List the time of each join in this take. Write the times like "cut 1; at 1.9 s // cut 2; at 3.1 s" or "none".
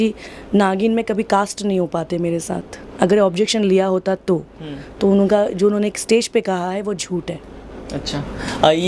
none

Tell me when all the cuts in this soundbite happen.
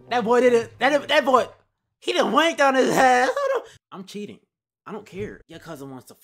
cut 1; at 3.8 s // cut 2; at 5.4 s

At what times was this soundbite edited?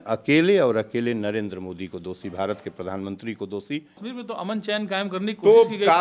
cut 1; at 4.1 s

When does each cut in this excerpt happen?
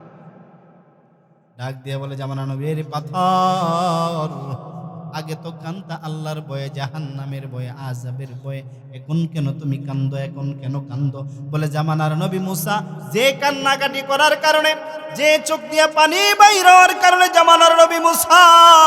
none

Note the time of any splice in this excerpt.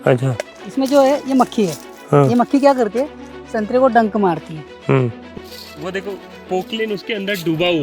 cut 1; at 5.3 s

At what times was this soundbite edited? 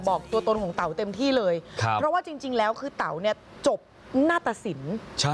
none

